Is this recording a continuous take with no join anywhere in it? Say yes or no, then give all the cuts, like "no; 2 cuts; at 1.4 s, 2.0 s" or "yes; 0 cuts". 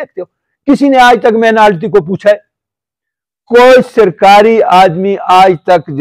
yes; 0 cuts